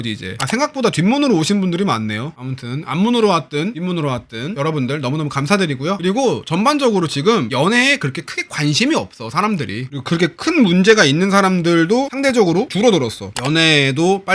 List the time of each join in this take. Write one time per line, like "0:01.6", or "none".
0:06.0